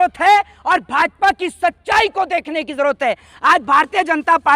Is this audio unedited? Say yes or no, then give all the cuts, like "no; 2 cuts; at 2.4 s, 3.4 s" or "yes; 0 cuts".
yes; 0 cuts